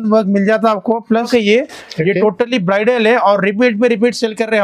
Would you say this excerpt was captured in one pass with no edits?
no; 1 cut; at 1.1 s

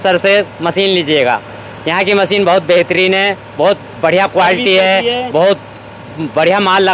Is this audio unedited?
yes; 0 cuts

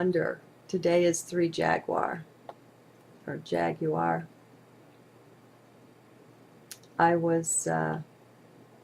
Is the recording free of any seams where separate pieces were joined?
no; 1 cut; at 6.3 s

